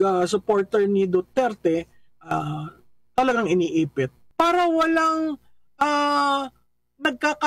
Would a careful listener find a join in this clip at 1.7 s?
no; 1 cut; at 4.2 s

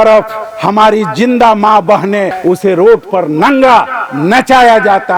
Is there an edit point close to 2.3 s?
yes; 1 cut; at 2.3 s

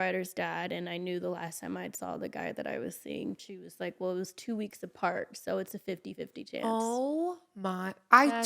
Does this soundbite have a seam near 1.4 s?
no; 1 cut; at 3.5 s

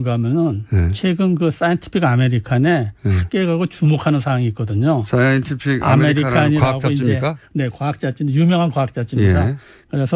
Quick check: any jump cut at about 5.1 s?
yes; 1 cut; at 5.1 s

